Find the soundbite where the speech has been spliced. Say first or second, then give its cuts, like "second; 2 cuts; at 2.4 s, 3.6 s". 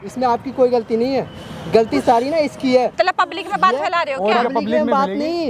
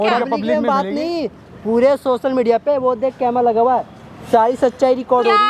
first; 1 cut; at 2.9 s